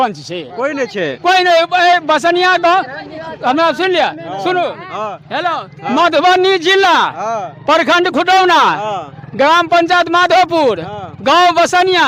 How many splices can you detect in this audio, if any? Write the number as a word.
zero